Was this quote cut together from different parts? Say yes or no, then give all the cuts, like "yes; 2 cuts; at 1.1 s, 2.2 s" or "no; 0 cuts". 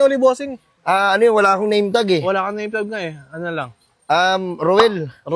no; 0 cuts